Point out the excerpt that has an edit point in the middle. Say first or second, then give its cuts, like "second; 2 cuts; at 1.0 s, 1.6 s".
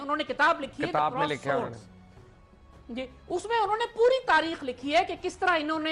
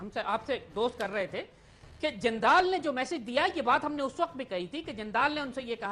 first; 1 cut; at 5.0 s